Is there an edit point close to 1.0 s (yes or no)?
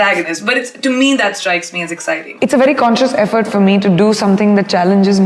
no